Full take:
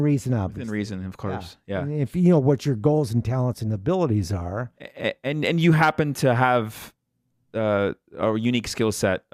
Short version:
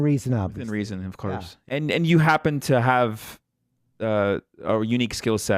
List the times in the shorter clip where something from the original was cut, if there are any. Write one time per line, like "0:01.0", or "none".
0:01.6